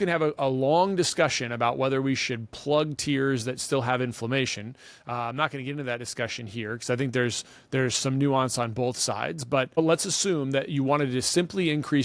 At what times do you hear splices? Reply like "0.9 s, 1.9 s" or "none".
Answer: 9.8 s